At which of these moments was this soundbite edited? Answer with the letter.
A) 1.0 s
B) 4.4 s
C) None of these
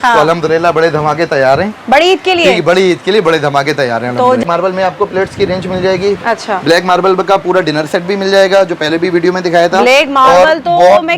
B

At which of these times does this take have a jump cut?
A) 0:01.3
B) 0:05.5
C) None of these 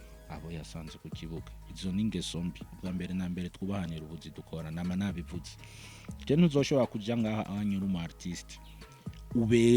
C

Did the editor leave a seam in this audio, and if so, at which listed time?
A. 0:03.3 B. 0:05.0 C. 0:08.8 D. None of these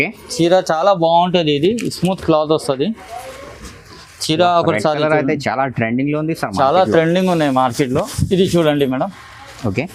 D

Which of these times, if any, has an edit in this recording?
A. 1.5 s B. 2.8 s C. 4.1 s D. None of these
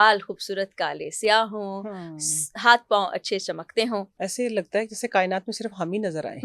C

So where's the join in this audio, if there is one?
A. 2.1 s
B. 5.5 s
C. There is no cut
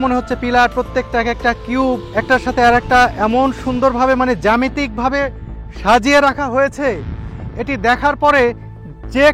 A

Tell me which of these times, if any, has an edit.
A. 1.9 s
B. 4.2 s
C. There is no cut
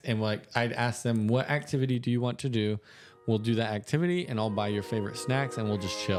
C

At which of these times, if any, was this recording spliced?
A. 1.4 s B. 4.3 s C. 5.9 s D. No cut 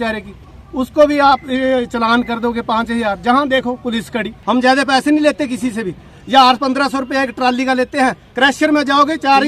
B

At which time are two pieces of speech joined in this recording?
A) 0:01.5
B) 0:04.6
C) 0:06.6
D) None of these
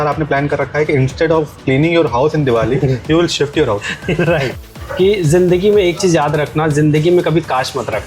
B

